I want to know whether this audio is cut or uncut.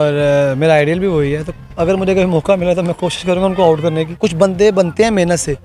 cut